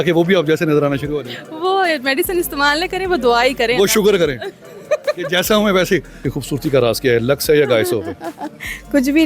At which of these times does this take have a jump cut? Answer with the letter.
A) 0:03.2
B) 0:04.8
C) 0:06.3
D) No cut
C